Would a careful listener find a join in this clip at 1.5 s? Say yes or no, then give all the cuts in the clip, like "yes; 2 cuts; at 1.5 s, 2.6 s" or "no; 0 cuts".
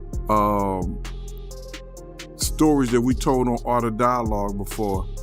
no; 0 cuts